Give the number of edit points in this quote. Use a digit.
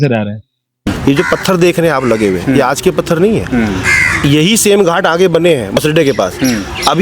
2